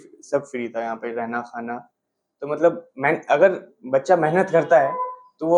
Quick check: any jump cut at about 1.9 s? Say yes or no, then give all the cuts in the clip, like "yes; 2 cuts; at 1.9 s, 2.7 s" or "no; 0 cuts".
no; 0 cuts